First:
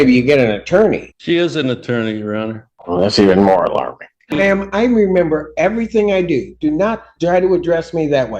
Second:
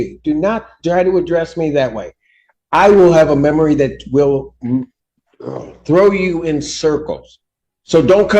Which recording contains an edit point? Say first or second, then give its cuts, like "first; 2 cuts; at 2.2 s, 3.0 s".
first; 3 cuts; at 1.1 s, 2.7 s, 4.4 s